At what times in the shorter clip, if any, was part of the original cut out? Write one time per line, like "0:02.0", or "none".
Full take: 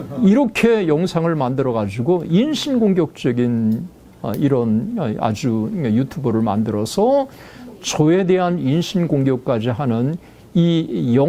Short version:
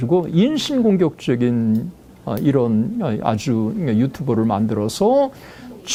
none